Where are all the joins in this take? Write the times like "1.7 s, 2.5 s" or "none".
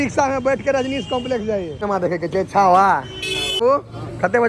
1.7 s, 3.5 s